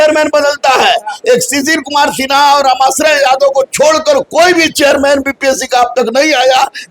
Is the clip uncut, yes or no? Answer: yes